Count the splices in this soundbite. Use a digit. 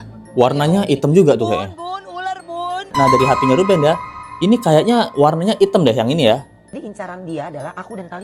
2